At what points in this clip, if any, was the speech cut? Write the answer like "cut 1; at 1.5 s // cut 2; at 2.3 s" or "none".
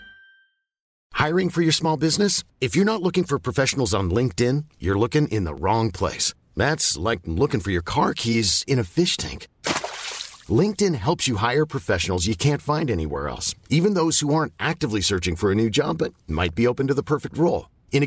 cut 1; at 0.9 s